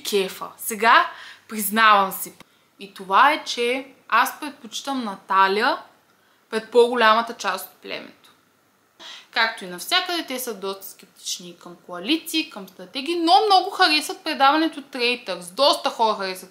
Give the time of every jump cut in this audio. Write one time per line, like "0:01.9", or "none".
0:02.2
0:09.1